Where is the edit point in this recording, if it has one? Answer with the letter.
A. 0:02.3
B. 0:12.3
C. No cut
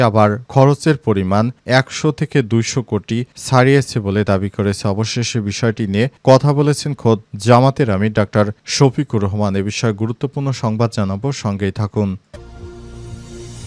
B